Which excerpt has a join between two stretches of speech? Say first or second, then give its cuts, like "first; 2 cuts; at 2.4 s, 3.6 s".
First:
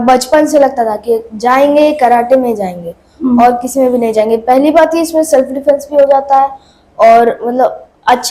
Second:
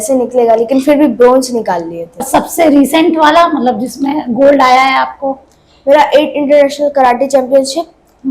second; 1 cut; at 2.2 s